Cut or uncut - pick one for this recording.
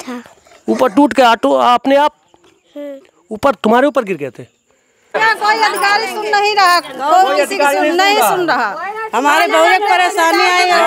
cut